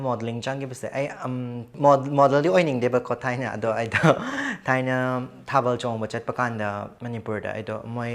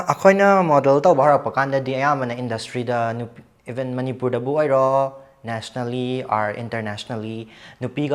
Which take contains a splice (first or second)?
first